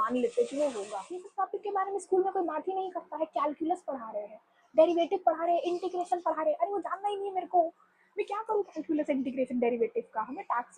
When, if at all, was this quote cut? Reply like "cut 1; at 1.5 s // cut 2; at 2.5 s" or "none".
cut 1; at 1.3 s